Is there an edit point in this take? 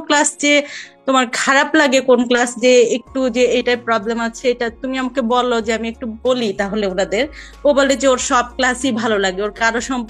no; 0 cuts

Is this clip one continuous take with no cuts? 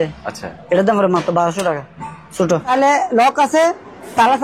no; 1 cut; at 2.7 s

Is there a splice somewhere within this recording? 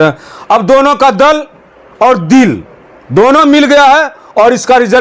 no; 0 cuts

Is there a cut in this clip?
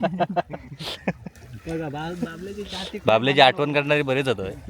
no; 0 cuts

